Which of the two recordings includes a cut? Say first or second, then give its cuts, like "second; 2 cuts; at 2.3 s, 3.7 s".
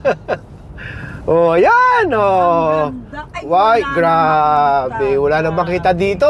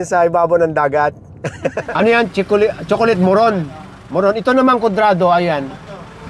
second; 1 cut; at 1.8 s